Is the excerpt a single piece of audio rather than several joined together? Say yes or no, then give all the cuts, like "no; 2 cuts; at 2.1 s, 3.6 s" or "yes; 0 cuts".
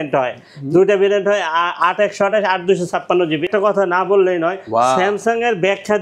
no; 1 cut; at 3.4 s